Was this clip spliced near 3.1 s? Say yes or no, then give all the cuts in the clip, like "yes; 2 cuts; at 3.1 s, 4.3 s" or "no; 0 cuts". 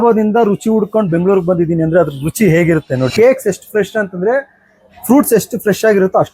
yes; 1 cut; at 3.1 s